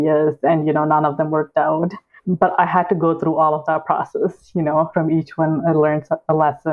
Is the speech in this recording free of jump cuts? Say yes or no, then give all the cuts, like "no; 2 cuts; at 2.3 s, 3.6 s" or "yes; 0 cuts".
no; 2 cuts; at 2.2 s, 4.9 s